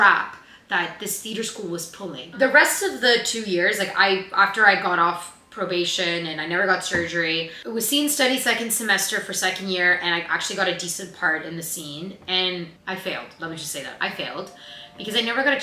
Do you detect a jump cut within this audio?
no; 0 cuts

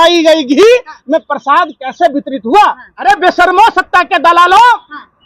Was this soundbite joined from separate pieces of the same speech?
yes; 1 cut; at 2.9 s

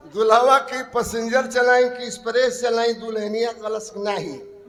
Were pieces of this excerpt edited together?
no; 0 cuts

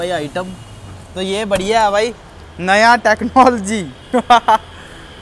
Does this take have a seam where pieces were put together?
no; 0 cuts

